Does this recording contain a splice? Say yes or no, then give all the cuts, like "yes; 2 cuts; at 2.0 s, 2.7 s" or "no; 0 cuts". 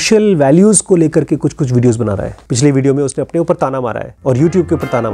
yes; 2 cuts; at 2.4 s, 4.1 s